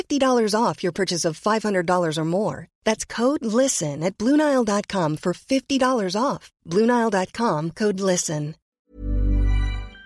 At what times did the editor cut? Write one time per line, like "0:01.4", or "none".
0:08.7

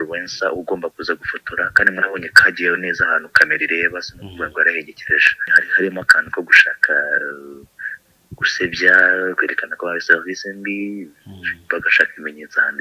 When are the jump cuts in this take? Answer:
0:05.6

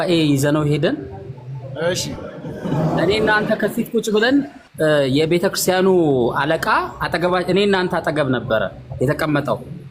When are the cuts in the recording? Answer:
none

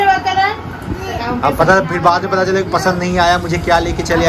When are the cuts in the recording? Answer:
none

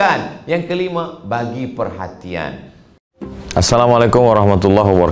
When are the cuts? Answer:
0:03.0

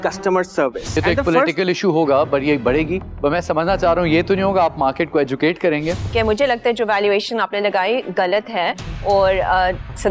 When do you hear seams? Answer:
0:01.0
0:06.0

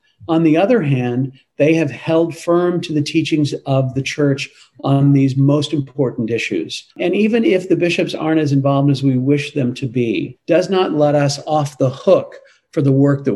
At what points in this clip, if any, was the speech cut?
0:07.0
0:10.3

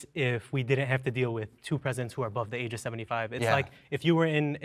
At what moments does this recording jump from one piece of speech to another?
none

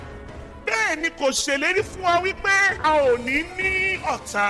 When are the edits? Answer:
0:02.7

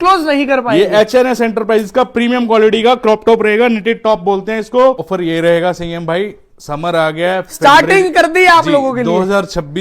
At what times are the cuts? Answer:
0:05.1

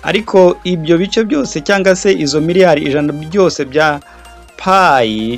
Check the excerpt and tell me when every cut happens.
none

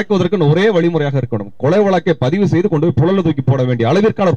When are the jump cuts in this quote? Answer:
none

